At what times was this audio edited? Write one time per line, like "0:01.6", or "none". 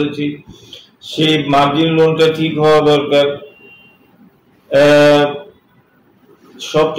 none